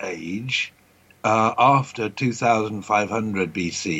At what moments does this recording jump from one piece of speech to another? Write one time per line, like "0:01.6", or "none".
none